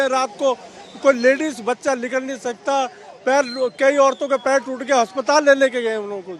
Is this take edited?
no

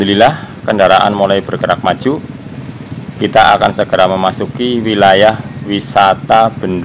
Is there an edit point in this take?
no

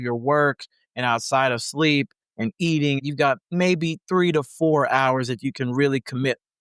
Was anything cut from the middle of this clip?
yes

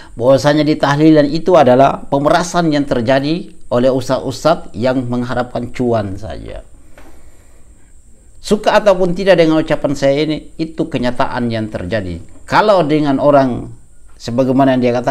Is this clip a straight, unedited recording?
yes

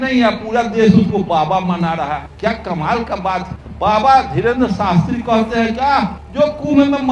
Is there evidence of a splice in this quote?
yes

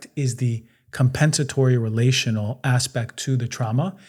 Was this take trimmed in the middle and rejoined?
no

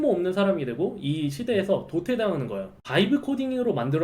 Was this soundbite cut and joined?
yes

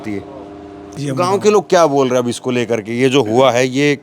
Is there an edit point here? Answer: yes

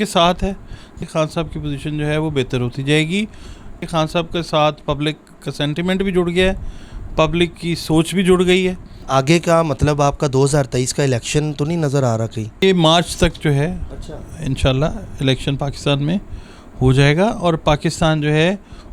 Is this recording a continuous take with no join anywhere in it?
no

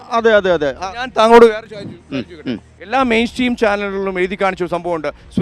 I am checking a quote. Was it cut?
no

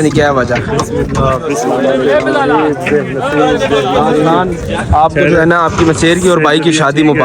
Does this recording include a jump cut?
no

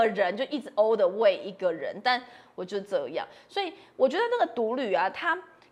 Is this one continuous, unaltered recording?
yes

